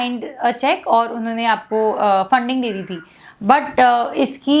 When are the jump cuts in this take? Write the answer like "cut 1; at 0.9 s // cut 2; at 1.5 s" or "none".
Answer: none